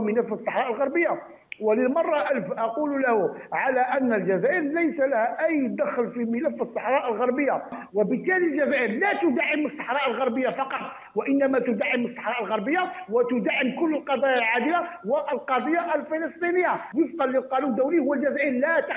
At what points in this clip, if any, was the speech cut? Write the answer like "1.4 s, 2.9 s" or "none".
7.8 s, 16.8 s